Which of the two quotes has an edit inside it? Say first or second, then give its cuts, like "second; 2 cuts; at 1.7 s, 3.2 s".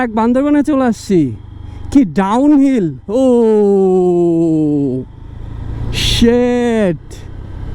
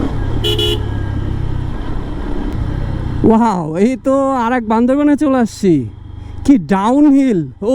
second; 1 cut; at 2.5 s